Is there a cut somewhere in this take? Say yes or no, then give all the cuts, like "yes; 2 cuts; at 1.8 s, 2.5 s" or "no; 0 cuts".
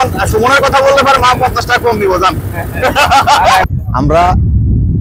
yes; 1 cut; at 3.7 s